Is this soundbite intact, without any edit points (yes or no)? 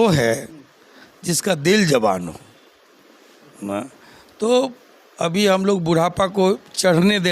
yes